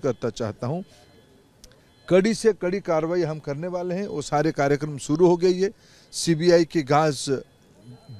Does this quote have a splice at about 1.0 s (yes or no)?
no